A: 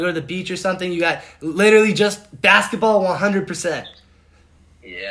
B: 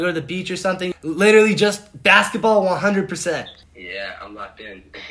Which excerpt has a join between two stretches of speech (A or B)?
B